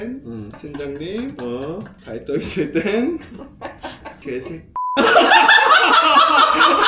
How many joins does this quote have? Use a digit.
0